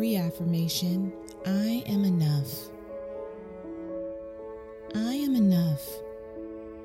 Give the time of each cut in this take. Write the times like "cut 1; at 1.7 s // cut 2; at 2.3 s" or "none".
cut 1; at 3.0 s // cut 2; at 4.9 s